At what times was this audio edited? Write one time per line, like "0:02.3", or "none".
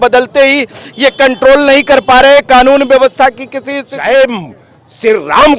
0:03.9

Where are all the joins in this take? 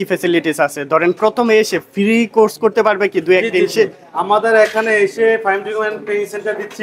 none

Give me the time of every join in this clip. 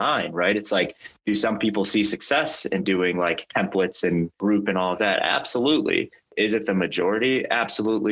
0:01.1
0:04.4
0:06.3

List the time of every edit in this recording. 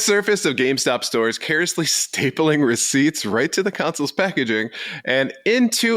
none

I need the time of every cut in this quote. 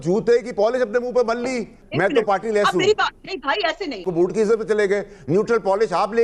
0:01.8
0:04.0

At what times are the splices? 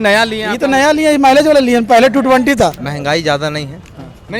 0:02.8

